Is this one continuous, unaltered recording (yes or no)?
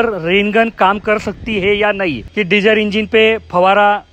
no